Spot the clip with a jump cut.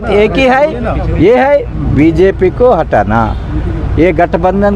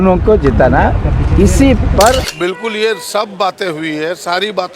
second; 1 cut; at 2.3 s

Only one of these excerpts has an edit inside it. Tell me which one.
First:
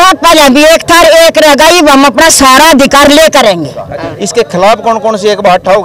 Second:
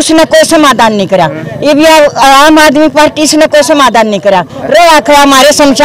first; 1 cut; at 4.0 s

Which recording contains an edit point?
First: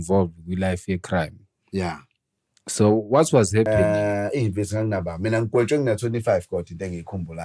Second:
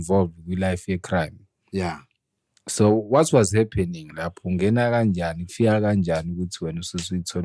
first; 1 cut; at 3.7 s

